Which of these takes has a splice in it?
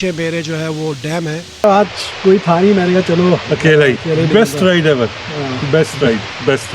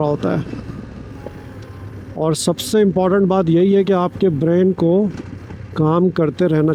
first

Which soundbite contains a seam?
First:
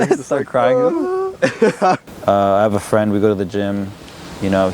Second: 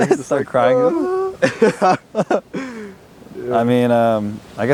first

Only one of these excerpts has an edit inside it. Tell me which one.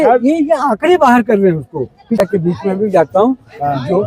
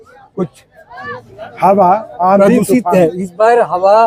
first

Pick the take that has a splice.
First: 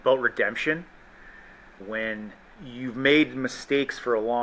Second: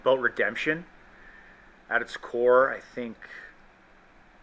first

